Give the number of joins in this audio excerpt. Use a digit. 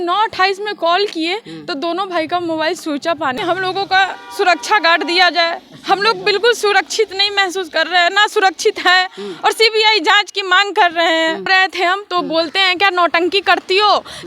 2